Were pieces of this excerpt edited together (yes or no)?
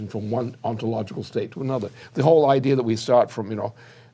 yes